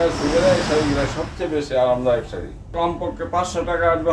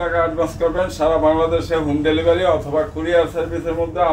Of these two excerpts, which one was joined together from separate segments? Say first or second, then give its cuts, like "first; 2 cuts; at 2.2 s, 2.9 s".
first; 1 cut; at 2.7 s